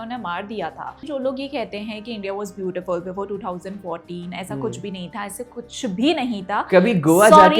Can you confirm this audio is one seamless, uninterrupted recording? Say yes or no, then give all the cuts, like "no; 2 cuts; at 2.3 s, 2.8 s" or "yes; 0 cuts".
no; 1 cut; at 1.0 s